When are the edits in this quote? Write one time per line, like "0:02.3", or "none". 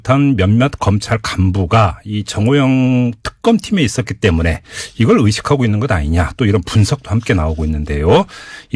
0:02.7